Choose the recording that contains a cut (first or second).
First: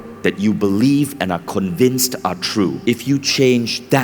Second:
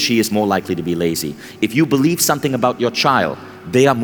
first